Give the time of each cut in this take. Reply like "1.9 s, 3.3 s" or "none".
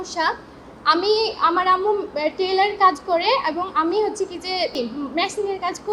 4.8 s